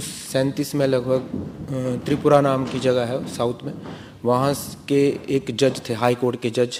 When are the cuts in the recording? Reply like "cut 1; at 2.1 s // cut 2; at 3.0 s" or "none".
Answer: none